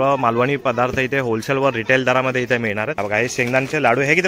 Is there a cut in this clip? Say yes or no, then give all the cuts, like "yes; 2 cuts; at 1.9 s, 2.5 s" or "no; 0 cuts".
yes; 1 cut; at 3.0 s